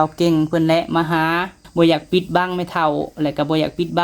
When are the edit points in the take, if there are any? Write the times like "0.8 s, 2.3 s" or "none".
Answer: 1.6 s